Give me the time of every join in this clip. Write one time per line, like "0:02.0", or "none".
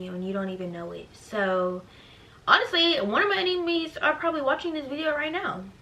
none